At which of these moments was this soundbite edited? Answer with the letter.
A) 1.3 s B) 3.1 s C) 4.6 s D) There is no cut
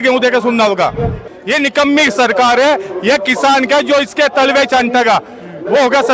A